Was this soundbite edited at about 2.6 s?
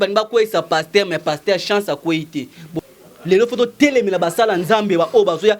yes; 1 cut; at 2.6 s

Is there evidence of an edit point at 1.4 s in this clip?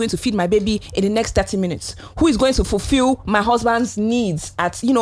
no; 0 cuts

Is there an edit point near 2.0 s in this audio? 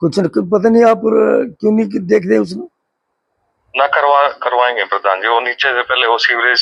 no; 0 cuts

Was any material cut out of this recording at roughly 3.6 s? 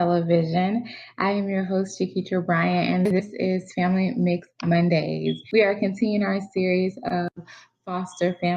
no; 1 cut; at 5.4 s

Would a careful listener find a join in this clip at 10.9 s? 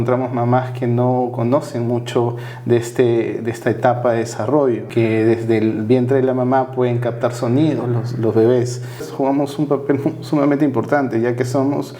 no; 2 cuts; at 4.8 s, 9.1 s

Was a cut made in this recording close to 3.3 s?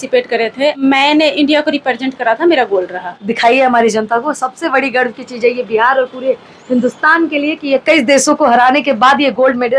yes; 2 cuts; at 0.8 s, 3.3 s

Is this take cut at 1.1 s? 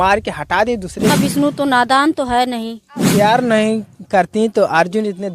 yes; 2 cuts; at 1.1 s, 3.1 s

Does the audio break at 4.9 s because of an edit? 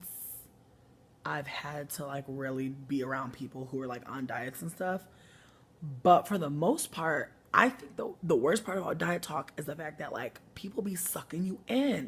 no; 0 cuts

